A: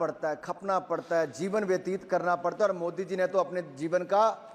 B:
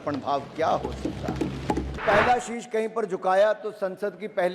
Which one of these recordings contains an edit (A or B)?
B